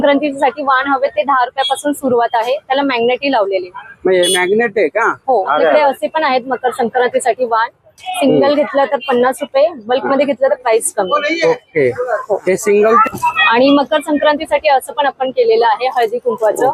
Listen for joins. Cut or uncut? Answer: cut